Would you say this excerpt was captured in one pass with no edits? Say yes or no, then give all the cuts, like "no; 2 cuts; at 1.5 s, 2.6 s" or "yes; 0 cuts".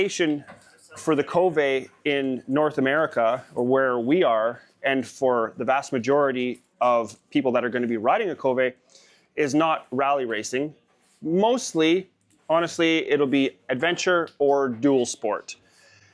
yes; 0 cuts